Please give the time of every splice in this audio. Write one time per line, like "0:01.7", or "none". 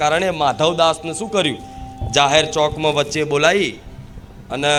none